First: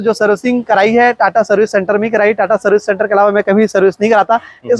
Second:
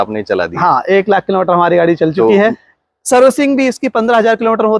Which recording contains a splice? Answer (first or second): second